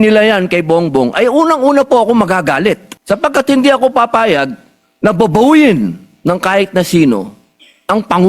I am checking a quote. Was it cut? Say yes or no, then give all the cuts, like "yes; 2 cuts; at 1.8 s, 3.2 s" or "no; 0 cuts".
yes; 1 cut; at 2.9 s